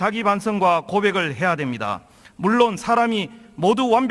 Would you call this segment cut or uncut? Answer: cut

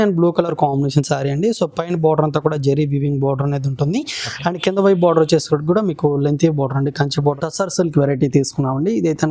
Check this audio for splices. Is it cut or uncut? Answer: cut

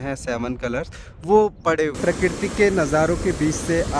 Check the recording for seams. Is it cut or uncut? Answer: cut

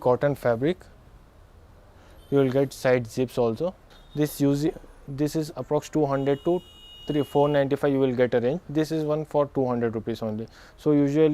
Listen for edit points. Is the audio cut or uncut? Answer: uncut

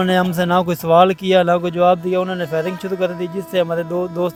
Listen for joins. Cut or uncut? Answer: uncut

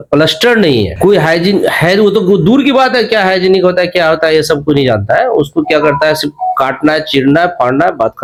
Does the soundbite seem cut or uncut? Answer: uncut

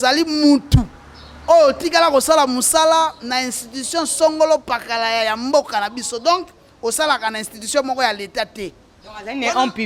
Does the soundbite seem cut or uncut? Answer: uncut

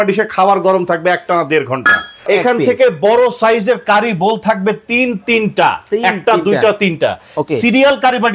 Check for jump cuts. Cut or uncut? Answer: cut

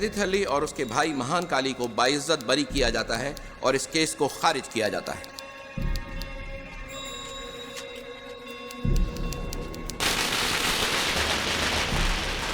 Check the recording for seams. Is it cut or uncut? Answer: uncut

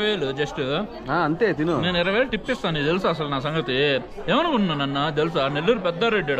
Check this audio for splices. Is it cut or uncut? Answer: uncut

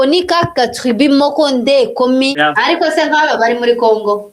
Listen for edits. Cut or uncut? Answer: cut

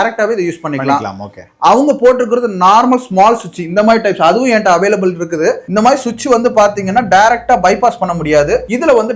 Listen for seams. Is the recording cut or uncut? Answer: uncut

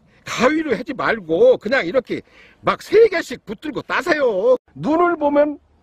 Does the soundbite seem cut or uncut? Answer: cut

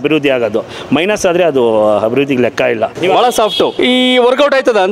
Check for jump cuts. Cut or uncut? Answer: cut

